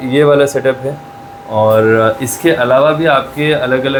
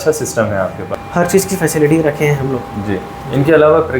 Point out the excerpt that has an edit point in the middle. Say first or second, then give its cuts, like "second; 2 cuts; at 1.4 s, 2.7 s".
second; 1 cut; at 0.9 s